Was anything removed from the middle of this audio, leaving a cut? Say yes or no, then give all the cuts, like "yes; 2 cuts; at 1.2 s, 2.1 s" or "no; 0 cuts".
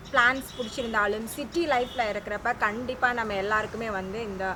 no; 0 cuts